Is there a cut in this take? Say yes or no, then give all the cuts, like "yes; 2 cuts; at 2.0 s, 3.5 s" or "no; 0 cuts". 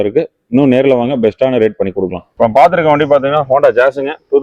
yes; 1 cut; at 2.3 s